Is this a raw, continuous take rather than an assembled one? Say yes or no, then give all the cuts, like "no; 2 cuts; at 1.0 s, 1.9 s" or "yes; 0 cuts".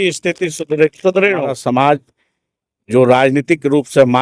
no; 1 cut; at 1.6 s